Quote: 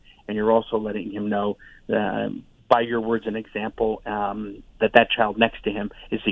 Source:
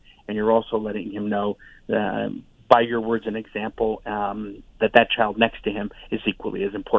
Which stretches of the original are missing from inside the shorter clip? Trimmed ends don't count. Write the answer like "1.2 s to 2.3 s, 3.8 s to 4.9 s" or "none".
none